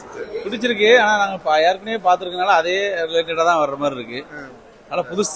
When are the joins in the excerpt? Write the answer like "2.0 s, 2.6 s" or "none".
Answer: none

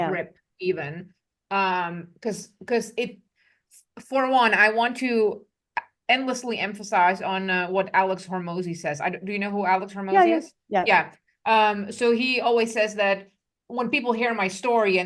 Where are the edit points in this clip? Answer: none

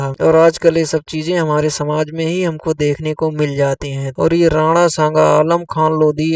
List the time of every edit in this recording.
4.0 s

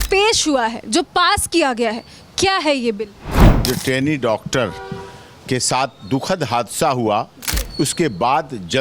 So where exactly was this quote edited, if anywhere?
3.2 s

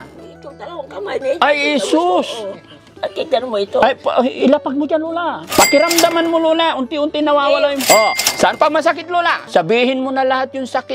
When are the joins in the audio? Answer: 5.4 s, 7.8 s, 9.4 s

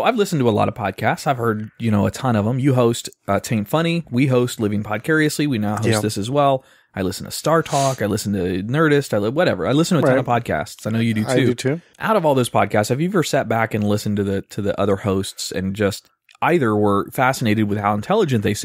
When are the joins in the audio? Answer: 14.8 s

